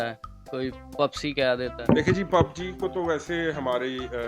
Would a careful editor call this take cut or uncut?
cut